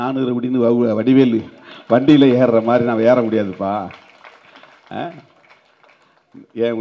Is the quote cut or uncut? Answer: uncut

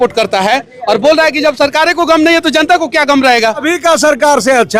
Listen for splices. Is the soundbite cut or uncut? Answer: cut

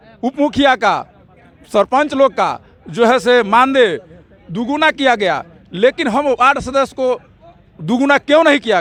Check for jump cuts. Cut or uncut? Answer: uncut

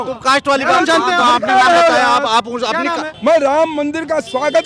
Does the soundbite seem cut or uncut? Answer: cut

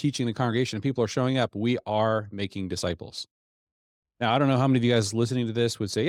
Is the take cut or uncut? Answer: uncut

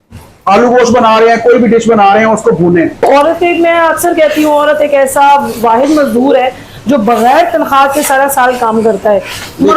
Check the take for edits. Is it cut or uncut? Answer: cut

